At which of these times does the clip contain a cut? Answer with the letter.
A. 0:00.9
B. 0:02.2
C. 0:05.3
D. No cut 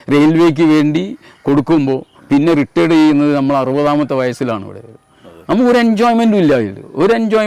D